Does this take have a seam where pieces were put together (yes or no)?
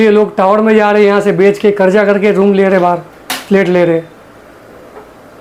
no